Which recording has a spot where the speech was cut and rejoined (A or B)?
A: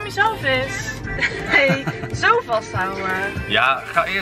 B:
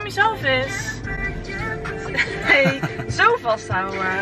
A